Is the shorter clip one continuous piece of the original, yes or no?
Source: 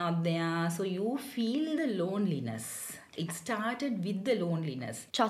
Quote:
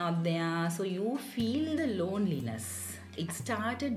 yes